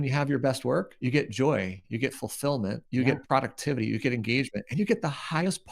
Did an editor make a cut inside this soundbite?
yes; 3 cuts; at 0.9 s, 1.8 s, 2.8 s

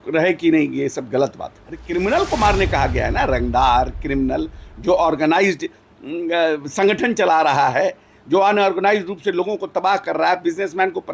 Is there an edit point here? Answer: yes; 1 cut; at 1.9 s

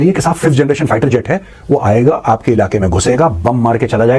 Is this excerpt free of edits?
yes; 0 cuts

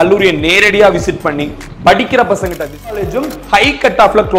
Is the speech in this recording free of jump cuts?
no; 1 cut; at 2.9 s

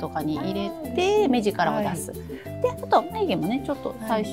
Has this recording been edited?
no; 0 cuts

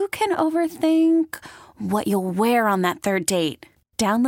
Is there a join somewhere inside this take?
no; 0 cuts

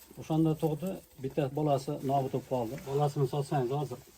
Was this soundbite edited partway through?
yes; 1 cut; at 2.8 s

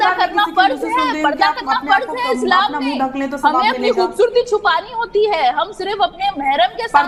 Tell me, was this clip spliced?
no; 0 cuts

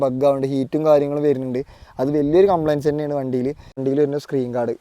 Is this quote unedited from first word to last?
no; 1 cut; at 3.8 s

